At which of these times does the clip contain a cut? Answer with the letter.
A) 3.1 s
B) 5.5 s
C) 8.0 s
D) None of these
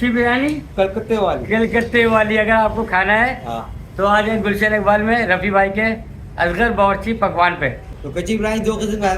C